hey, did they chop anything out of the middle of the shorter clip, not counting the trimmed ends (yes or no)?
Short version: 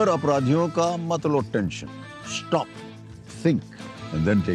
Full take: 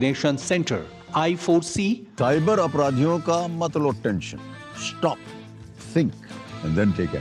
no